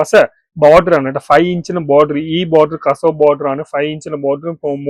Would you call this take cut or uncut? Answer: uncut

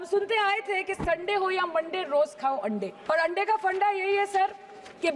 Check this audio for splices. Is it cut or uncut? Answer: cut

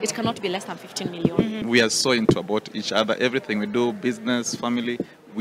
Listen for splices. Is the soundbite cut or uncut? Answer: cut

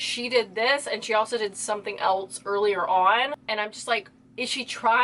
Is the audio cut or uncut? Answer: cut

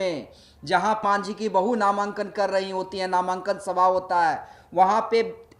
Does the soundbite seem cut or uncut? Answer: cut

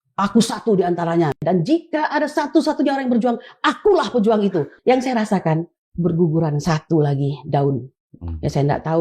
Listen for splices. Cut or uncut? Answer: cut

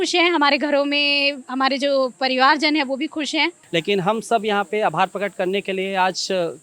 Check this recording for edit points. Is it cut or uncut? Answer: cut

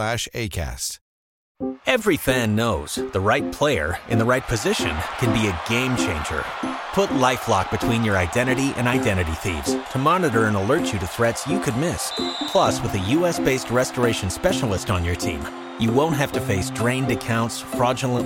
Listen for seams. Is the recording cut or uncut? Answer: cut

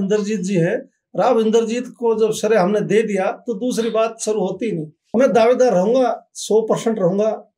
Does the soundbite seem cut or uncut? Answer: cut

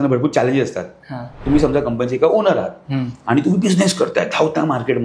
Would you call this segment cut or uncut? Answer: cut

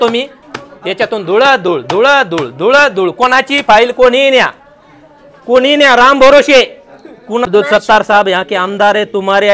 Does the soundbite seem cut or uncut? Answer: cut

